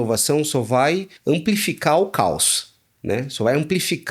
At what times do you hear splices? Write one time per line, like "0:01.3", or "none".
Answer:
0:01.1